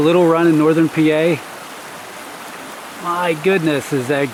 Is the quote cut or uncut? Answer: uncut